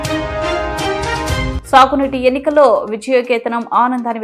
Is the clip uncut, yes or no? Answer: yes